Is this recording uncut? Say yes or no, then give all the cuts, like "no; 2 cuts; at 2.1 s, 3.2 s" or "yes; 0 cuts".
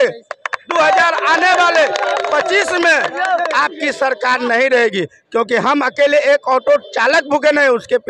yes; 0 cuts